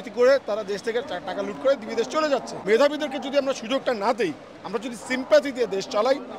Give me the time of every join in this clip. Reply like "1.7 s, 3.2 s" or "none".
2.6 s